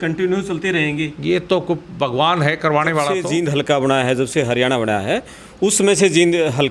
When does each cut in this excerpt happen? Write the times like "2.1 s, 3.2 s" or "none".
3.2 s